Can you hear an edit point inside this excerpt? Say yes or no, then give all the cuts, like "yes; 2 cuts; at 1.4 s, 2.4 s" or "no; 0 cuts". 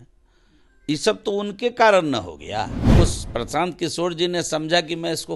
yes; 1 cut; at 2.9 s